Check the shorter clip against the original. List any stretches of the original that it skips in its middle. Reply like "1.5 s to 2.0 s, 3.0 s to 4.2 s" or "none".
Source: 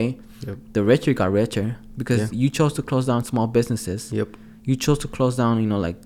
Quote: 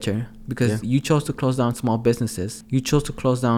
4.0 s to 4.4 s